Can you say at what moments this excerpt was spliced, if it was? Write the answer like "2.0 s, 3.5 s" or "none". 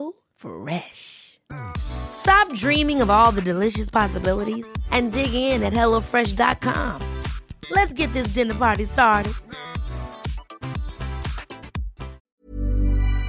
12.2 s